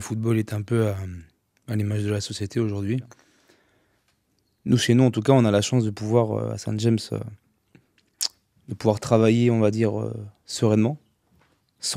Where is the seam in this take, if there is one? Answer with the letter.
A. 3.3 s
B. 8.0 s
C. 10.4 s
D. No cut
A